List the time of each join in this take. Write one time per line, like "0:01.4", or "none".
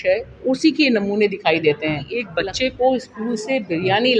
0:02.2